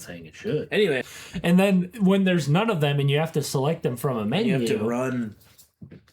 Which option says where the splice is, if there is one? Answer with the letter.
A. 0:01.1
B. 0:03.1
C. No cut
A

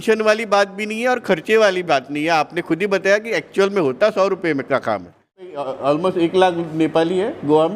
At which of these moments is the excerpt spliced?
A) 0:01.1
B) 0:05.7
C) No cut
B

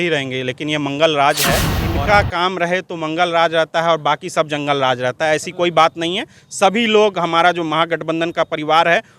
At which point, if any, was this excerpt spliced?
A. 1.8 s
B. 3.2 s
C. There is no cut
A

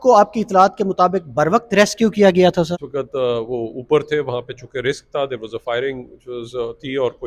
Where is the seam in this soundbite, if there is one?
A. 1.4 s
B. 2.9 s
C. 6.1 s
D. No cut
B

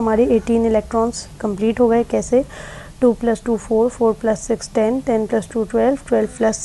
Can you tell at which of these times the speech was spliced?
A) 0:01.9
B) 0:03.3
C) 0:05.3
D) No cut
D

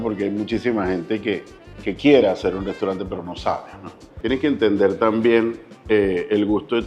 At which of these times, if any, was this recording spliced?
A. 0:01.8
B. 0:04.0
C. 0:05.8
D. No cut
B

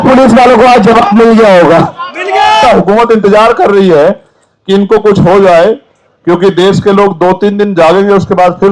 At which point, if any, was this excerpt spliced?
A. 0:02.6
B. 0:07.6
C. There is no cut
A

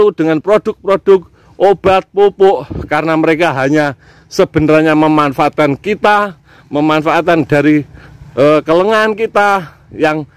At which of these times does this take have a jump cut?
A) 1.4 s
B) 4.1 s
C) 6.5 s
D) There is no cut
D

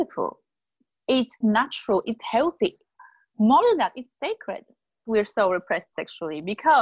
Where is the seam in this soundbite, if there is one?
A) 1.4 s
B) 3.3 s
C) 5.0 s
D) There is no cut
C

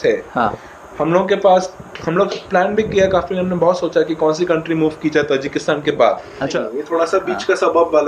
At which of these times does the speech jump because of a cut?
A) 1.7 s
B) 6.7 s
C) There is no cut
B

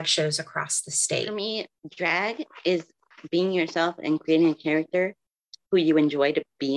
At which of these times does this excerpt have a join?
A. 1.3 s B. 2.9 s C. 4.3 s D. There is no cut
A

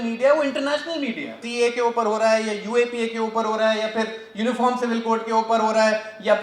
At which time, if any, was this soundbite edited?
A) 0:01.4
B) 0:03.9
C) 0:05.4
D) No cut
A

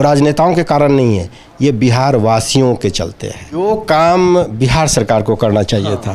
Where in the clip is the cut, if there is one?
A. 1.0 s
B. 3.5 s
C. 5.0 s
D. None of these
B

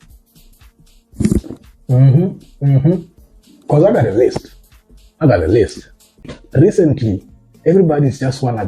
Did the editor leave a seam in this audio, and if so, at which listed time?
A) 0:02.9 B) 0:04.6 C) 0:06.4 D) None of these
C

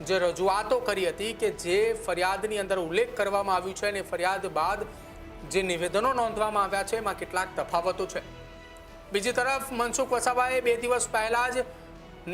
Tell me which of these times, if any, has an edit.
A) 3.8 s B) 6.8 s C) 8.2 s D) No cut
D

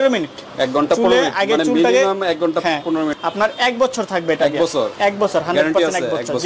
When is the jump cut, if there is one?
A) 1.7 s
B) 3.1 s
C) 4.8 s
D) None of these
B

